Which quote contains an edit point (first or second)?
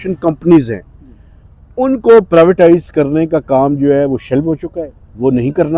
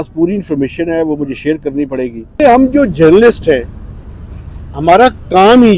second